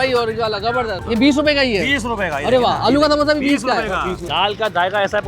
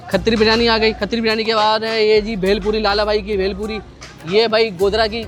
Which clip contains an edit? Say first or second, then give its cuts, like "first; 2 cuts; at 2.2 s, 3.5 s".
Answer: first; 2 cuts; at 1.0 s, 4.3 s